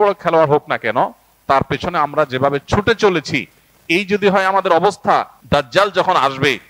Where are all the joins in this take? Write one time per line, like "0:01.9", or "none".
0:05.4